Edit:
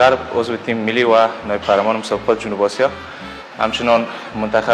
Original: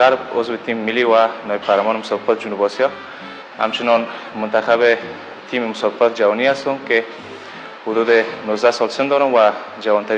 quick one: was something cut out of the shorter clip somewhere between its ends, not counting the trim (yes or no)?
no